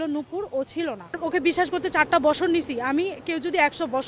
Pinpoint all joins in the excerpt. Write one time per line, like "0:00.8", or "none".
0:01.2